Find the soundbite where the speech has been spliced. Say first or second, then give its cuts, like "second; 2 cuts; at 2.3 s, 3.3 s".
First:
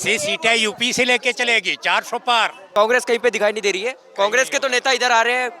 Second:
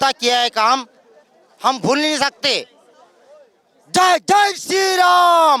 first; 1 cut; at 2.7 s